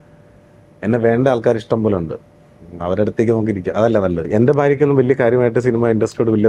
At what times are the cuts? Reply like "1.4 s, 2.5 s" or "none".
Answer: 4.3 s

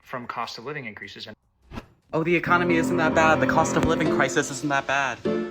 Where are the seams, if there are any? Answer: 1.5 s

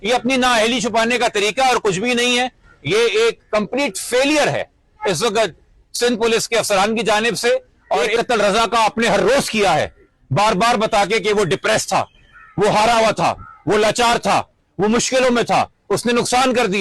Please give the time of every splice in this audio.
8.1 s

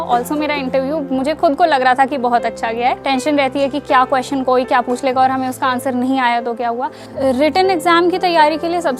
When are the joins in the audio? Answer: 3.0 s, 7.0 s

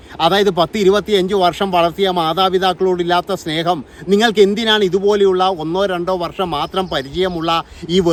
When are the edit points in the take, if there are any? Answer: none

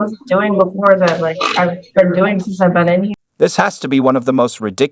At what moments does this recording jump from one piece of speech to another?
none

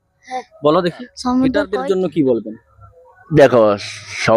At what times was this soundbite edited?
1.7 s

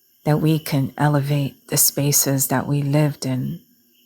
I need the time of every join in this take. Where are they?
1.6 s

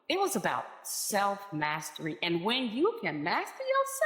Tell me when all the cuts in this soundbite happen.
1.5 s

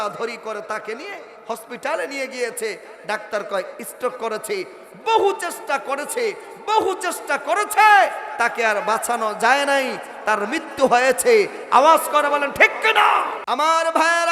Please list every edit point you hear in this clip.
13.4 s

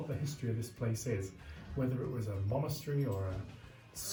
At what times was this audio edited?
none

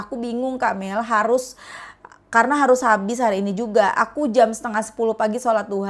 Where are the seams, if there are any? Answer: none

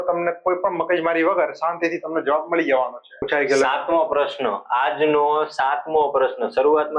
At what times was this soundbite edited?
3.1 s

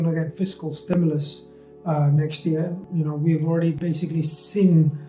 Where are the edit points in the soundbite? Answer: 2.8 s

